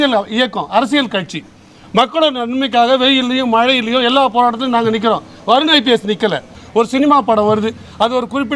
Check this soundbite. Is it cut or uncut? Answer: cut